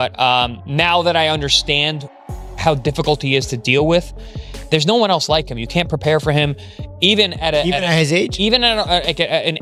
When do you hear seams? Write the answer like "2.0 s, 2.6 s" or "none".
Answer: none